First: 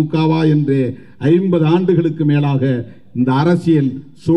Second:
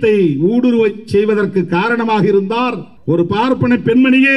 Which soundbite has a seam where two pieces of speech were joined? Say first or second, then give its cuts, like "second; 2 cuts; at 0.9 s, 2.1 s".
second; 1 cut; at 2.9 s